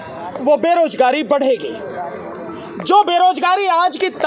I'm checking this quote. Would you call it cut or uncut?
uncut